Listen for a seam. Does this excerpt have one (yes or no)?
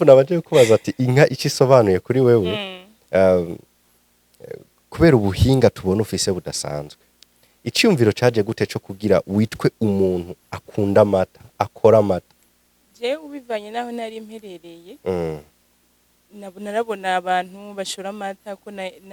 no